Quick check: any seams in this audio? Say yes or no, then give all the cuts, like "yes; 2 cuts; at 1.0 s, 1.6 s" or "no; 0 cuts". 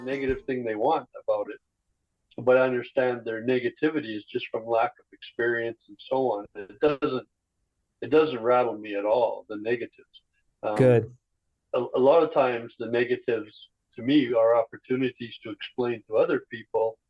no; 0 cuts